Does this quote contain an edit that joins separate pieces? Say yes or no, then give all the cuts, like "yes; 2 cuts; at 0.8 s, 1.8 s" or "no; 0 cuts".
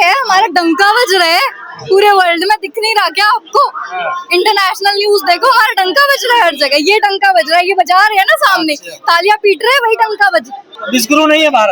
no; 0 cuts